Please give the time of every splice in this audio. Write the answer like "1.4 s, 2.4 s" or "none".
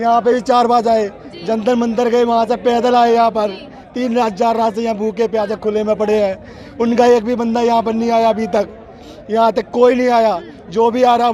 none